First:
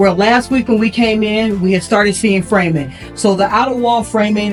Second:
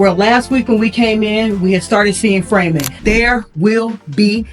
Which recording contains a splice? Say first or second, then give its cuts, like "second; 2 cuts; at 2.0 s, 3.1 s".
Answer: second; 1 cut; at 3.0 s